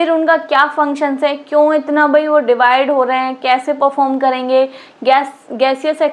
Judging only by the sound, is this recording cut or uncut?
uncut